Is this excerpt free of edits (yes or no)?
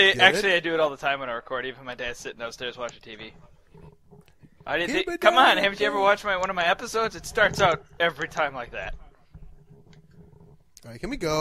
no